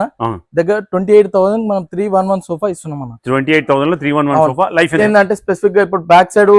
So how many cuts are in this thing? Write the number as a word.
one